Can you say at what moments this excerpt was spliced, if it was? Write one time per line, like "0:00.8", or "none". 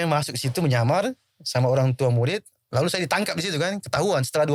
none